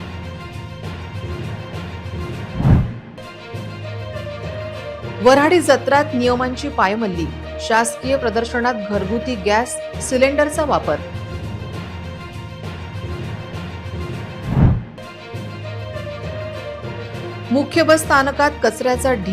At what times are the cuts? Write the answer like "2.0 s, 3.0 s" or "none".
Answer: 2.3 s